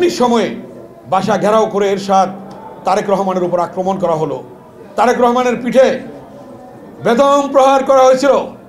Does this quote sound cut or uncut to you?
uncut